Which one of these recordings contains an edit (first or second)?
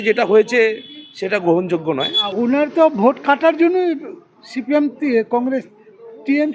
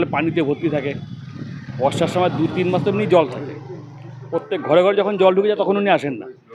first